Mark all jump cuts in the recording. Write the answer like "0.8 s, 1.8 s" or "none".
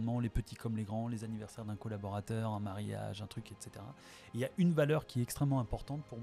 none